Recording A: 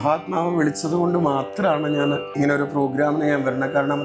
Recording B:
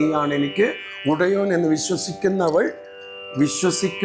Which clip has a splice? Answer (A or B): A